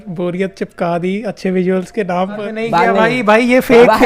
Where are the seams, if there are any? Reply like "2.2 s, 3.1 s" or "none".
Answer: 2.5 s